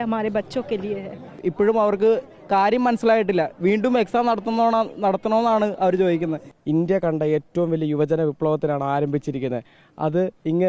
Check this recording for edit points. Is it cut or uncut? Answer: cut